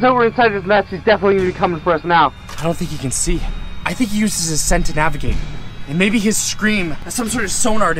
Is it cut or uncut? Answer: cut